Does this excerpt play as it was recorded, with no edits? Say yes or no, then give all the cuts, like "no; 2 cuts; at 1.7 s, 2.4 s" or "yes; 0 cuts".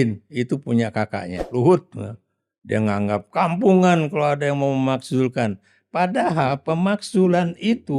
no; 1 cut; at 1.4 s